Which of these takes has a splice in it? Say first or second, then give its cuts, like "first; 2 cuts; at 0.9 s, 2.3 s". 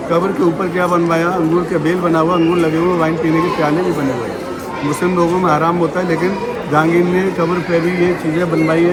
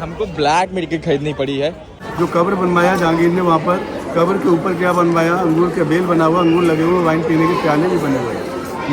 second; 1 cut; at 1.9 s